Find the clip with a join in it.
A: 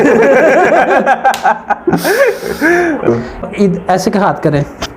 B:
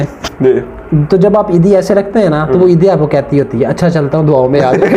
A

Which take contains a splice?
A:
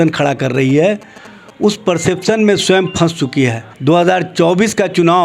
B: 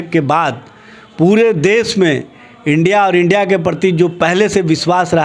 A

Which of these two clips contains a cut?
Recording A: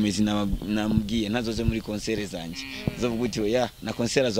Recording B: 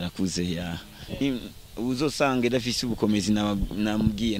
B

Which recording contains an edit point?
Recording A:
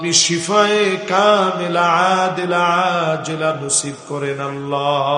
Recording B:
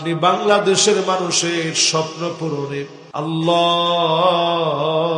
B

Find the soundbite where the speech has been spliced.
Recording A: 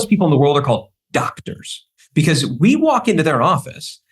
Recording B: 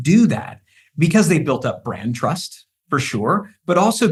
A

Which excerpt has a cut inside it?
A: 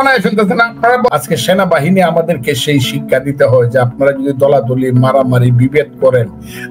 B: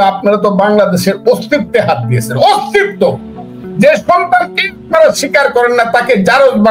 A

